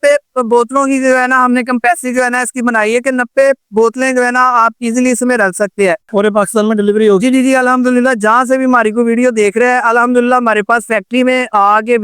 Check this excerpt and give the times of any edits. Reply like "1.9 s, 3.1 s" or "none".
6.0 s